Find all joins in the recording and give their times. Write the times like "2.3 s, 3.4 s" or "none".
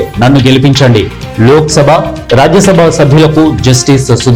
none